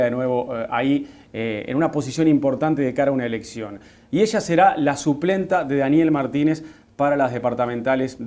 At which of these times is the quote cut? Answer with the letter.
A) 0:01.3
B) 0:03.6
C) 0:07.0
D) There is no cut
D